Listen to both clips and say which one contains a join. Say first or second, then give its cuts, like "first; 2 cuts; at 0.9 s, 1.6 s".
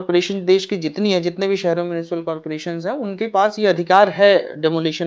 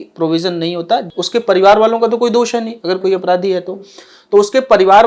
second; 1 cut; at 1.1 s